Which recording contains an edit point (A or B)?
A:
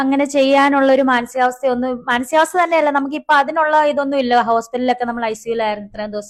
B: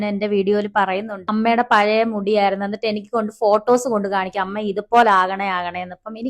B